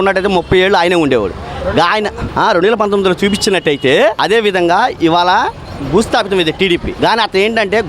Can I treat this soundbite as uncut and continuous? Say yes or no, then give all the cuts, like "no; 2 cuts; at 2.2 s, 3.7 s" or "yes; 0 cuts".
no; 3 cuts; at 2.2 s, 4.2 s, 6.9 s